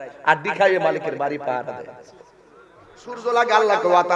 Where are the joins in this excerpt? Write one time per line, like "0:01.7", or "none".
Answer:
0:03.2